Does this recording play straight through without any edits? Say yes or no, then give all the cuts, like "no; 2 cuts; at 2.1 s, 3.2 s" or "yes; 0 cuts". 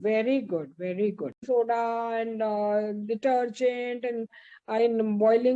no; 1 cut; at 1.4 s